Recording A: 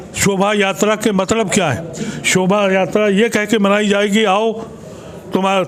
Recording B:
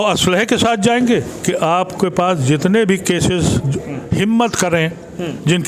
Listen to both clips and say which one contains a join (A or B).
B